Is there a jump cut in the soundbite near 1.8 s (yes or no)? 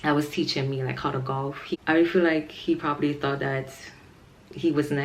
yes